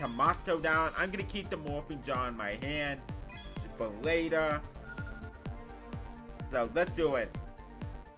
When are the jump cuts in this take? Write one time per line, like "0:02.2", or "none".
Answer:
none

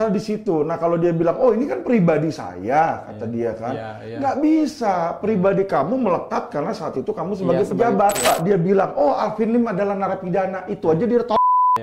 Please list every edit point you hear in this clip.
0:08.3

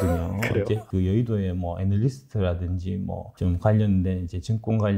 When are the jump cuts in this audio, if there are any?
0:00.8
0:03.3

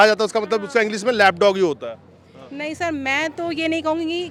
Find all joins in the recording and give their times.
none

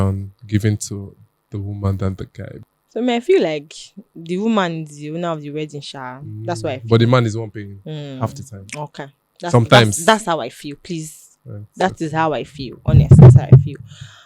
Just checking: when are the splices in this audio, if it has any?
0:02.6

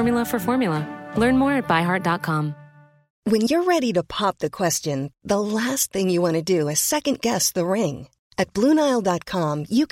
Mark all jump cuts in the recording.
0:03.1

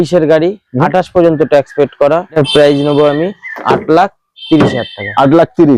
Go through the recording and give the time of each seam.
0:02.4

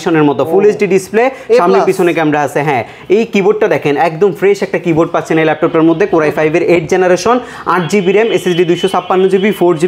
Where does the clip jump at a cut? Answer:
none

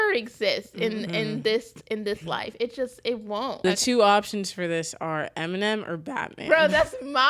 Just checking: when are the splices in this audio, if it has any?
0:03.6

